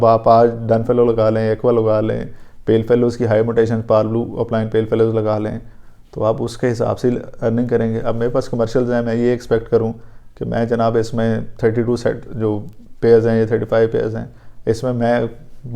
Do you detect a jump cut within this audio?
no; 0 cuts

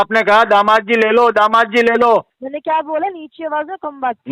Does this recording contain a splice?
yes; 1 cut; at 2.4 s

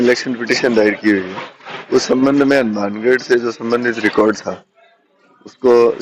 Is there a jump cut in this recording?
no; 0 cuts

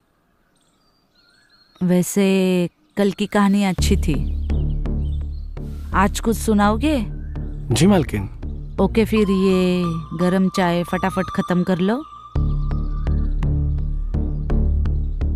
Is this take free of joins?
yes; 0 cuts

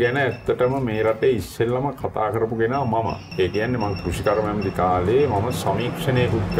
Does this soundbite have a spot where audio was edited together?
no; 0 cuts

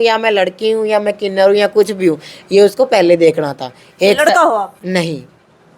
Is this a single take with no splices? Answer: yes; 0 cuts

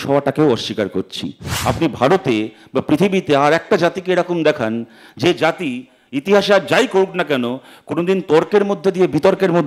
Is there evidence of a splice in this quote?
yes; 1 cut; at 1.5 s

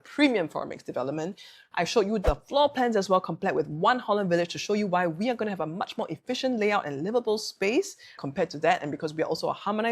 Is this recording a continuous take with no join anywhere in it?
yes; 0 cuts

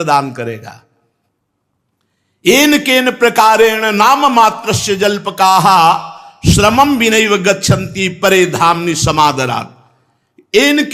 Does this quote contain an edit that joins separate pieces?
no; 0 cuts

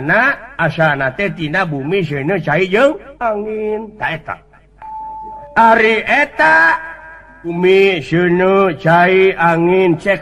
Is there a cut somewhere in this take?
yes; 2 cuts; at 5.4 s, 7.5 s

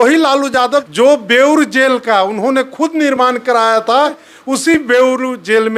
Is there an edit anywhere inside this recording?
yes; 2 cuts; at 0.9 s, 4.3 s

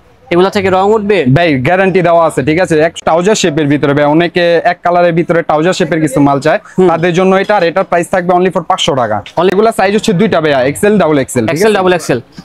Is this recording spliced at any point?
yes; 2 cuts; at 3.0 s, 9.5 s

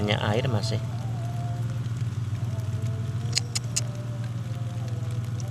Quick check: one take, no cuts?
yes; 0 cuts

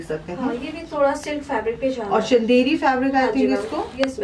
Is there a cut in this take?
no; 0 cuts

